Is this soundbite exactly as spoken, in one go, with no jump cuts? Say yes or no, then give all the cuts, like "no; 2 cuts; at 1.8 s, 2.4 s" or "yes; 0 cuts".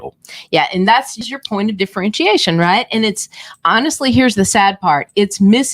no; 1 cut; at 1.2 s